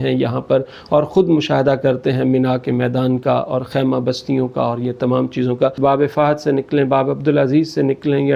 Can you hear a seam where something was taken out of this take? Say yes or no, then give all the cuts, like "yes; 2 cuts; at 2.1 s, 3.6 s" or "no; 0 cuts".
yes; 1 cut; at 5.8 s